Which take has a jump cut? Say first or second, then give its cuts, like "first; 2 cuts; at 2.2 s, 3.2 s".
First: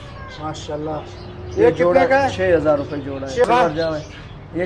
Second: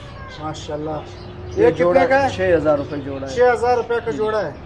first; 1 cut; at 3.4 s